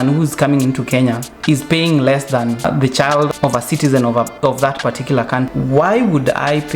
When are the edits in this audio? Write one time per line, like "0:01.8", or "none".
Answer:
0:02.6
0:05.5